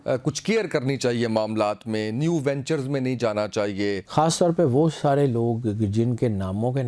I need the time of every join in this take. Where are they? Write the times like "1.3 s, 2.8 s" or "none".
4.0 s

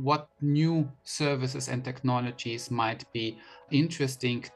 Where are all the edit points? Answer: none

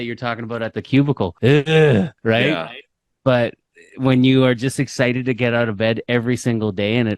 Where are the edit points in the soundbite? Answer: 1.3 s, 2.1 s

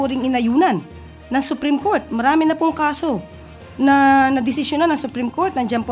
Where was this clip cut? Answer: none

